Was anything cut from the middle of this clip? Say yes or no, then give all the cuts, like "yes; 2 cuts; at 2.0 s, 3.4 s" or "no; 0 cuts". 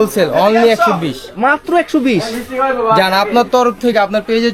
no; 0 cuts